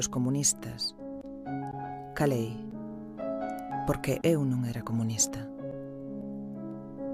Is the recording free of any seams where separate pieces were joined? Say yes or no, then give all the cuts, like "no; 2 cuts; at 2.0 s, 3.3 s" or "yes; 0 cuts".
yes; 0 cuts